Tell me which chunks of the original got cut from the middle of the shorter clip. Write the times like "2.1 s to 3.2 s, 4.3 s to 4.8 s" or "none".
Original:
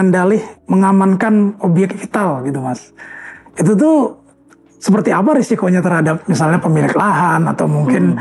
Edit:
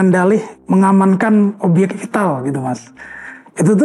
none